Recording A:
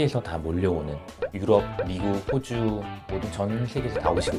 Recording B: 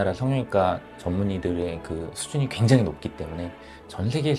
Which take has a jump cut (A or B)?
A